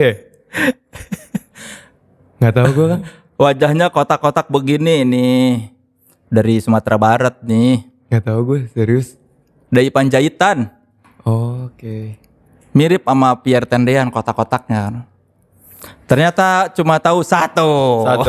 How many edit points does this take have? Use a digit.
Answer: 0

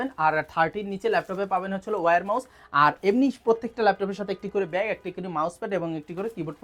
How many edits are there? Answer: 0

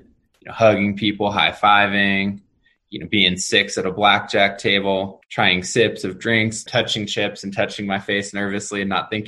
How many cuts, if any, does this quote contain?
1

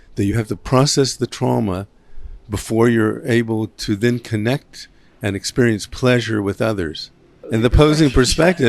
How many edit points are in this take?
1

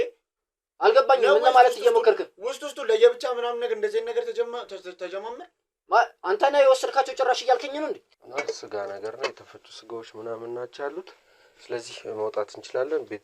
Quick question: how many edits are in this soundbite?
1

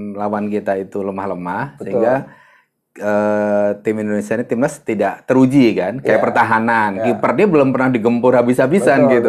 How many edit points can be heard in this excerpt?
0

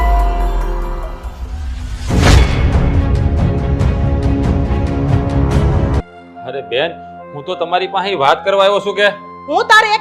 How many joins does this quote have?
1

